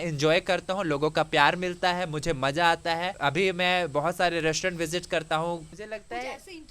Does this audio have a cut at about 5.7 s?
yes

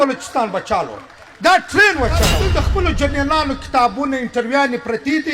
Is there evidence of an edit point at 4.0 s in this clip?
no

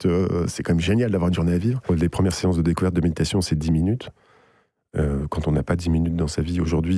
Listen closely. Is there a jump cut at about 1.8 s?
yes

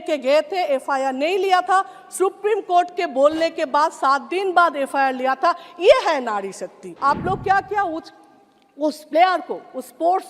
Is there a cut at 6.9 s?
yes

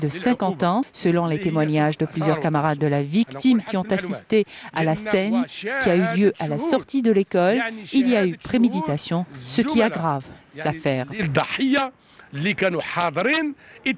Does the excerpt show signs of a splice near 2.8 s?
yes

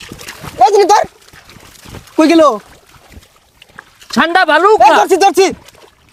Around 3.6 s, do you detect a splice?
no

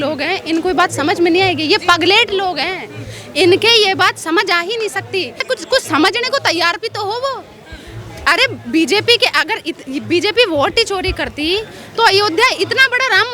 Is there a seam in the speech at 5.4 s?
yes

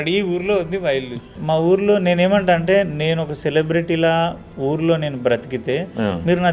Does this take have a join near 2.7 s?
no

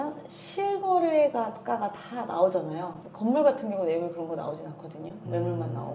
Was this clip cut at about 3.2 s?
no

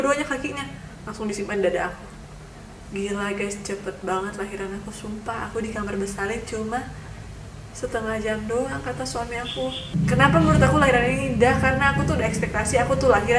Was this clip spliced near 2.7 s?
no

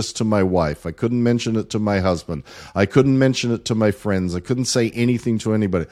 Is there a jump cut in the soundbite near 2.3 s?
no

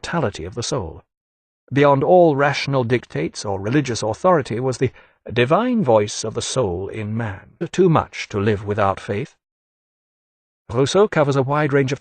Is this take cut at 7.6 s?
no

